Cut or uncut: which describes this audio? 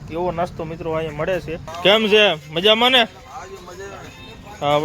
cut